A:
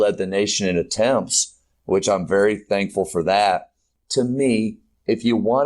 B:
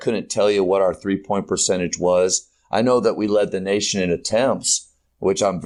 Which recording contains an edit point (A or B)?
A